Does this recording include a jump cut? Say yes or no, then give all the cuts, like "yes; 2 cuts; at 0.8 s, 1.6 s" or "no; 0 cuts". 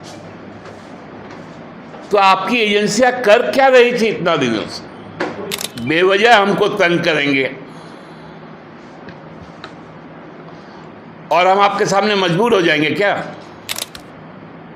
yes; 2 cuts; at 5.7 s, 13.9 s